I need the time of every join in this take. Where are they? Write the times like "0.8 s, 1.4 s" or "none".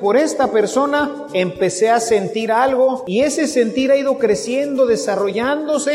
3.0 s